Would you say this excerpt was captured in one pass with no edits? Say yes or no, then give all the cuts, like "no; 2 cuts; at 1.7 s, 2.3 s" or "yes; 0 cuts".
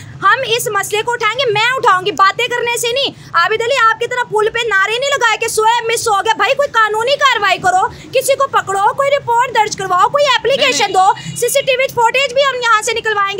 yes; 0 cuts